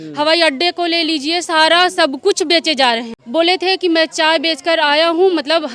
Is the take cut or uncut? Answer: cut